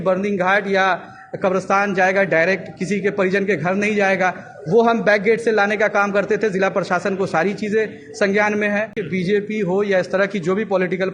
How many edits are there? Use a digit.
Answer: 1